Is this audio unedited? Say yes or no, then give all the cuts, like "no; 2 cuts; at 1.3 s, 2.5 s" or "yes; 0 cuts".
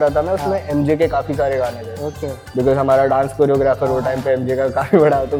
yes; 0 cuts